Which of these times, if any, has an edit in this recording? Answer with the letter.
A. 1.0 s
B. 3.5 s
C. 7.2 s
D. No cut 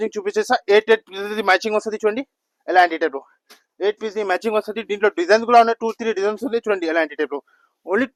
D